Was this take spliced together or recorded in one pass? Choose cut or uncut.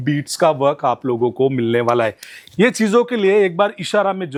uncut